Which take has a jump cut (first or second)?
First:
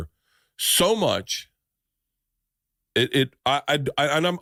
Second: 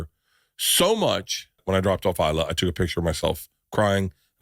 second